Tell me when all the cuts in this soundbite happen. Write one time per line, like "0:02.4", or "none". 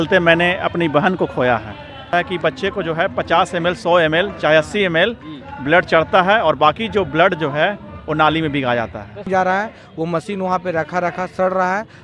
0:02.1
0:09.3